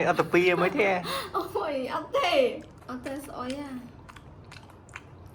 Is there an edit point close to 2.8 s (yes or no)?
yes